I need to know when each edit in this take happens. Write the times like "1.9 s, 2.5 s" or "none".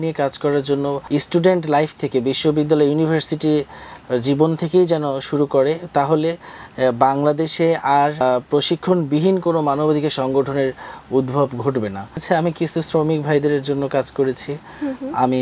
1.0 s, 8.2 s, 12.2 s